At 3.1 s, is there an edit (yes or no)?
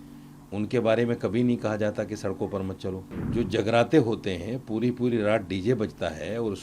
yes